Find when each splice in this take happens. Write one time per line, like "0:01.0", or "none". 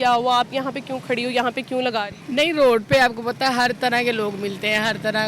none